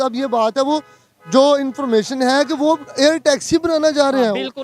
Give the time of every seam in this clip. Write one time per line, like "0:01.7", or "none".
none